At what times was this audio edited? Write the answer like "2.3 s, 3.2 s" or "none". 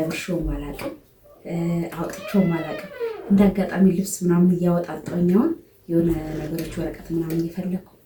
none